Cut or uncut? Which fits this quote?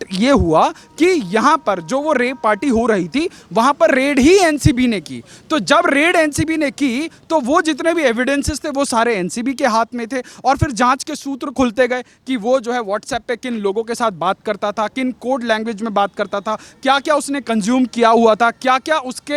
uncut